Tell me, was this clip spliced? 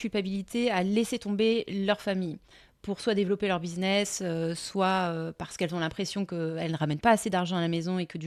no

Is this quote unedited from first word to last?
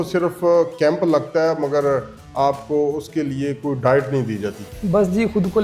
no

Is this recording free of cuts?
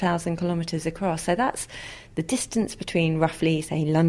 yes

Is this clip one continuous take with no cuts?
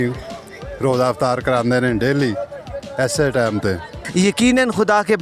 no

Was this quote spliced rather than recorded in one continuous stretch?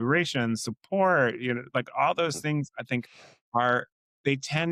no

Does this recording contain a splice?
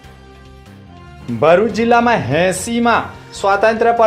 yes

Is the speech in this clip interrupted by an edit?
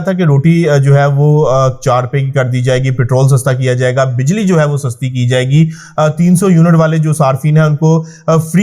no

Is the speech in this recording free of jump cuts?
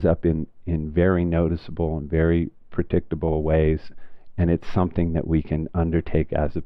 yes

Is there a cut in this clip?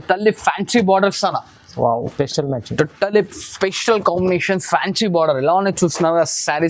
no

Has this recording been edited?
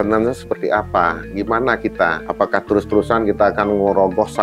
yes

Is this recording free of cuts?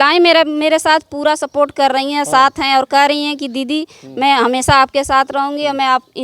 yes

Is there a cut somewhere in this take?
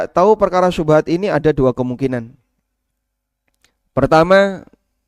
no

